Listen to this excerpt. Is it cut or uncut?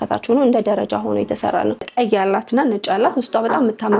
cut